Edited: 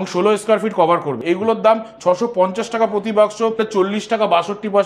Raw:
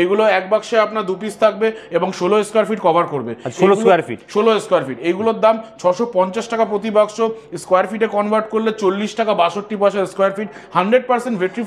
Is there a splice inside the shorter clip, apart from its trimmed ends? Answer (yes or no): yes